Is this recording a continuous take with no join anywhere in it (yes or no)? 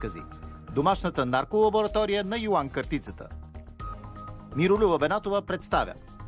no